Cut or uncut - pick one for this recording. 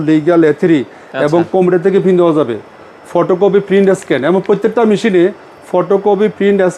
uncut